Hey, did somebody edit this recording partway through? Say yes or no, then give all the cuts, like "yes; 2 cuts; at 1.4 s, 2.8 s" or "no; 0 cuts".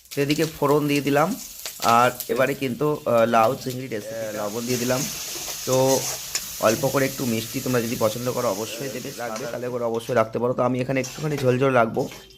yes; 2 cuts; at 4.1 s, 9.1 s